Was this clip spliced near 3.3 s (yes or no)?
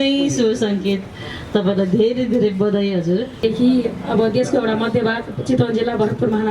yes